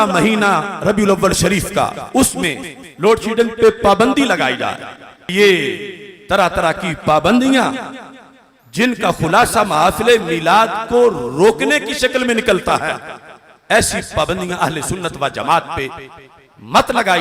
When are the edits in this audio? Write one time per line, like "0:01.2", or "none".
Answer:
0:05.3